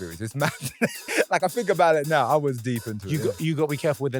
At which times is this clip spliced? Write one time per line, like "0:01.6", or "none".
none